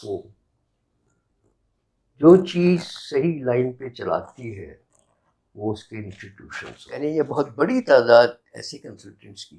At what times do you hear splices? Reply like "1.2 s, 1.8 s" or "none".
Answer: 6.9 s